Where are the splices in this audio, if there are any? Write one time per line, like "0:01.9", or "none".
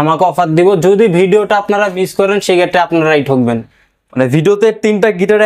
none